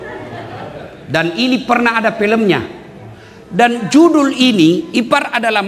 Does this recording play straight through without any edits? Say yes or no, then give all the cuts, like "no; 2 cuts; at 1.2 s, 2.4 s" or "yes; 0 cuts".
yes; 0 cuts